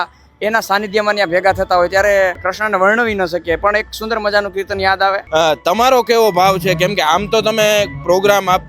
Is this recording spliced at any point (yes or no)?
yes